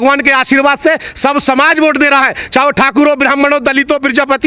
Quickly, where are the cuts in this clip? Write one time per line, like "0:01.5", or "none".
none